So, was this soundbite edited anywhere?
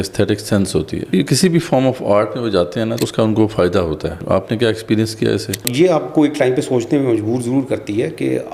yes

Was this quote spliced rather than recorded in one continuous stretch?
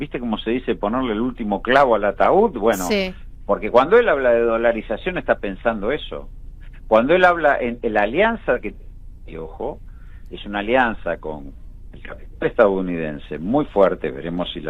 no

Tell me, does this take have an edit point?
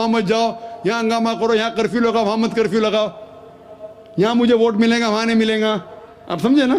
no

